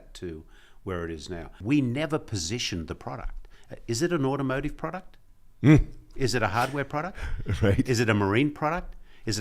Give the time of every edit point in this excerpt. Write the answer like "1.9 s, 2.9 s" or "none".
1.6 s